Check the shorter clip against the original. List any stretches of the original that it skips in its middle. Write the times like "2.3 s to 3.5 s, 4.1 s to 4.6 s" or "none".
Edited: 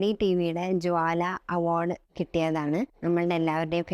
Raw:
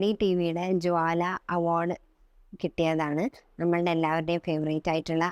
2.1 s to 2.5 s, 3.4 s to 3.5 s